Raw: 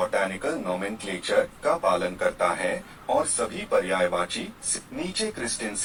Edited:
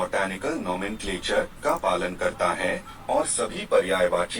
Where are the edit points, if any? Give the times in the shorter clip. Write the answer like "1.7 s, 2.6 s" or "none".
none